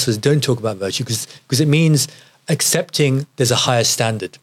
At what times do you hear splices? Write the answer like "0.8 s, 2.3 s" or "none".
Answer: none